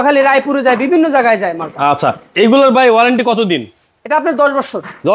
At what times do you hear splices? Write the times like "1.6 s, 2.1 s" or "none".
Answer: none